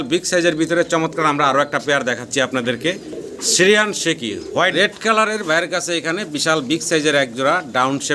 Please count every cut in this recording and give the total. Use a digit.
1